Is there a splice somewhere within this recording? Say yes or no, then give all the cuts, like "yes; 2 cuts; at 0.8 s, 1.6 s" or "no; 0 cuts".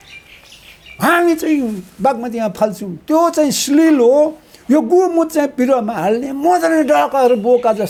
no; 0 cuts